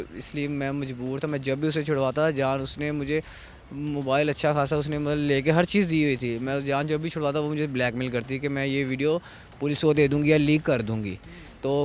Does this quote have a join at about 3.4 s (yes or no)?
no